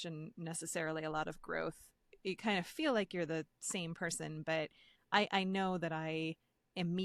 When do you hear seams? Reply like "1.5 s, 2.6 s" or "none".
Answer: none